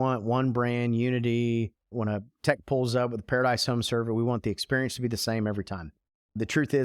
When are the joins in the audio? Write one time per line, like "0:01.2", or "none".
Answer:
0:01.9